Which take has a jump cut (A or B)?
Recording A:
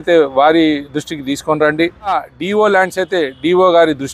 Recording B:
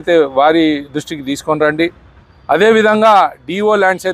A